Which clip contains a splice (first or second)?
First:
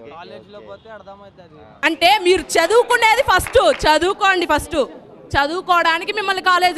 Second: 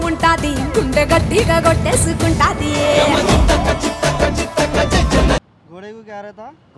second